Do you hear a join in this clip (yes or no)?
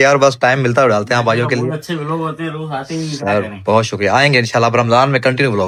no